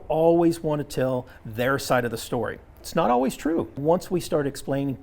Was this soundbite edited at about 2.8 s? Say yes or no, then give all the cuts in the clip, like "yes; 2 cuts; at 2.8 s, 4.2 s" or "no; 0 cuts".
yes; 2 cuts; at 2.8 s, 3.8 s